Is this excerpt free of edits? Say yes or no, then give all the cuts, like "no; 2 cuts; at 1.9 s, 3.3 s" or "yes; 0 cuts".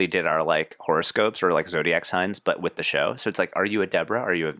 yes; 0 cuts